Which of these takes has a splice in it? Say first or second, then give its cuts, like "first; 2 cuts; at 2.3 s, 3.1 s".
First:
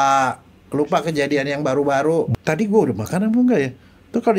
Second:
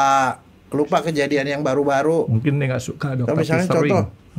first; 1 cut; at 2.3 s